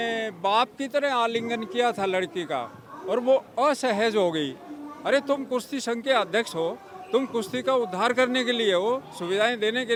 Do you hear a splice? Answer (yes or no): no